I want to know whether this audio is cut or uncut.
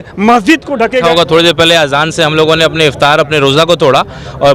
cut